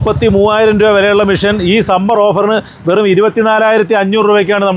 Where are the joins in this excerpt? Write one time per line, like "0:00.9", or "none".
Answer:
none